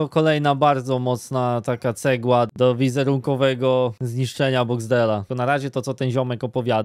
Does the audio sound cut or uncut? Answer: cut